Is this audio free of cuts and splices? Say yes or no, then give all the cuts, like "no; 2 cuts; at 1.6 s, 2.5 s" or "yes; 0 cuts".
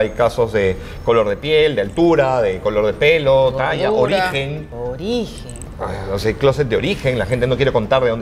no; 1 cut; at 4.7 s